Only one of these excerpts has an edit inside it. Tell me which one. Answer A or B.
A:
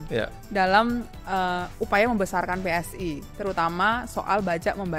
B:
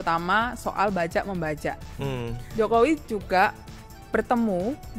B